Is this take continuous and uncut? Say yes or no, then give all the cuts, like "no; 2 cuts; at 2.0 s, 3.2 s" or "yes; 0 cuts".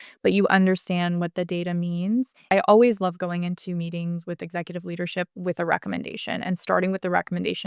no; 1 cut; at 2.4 s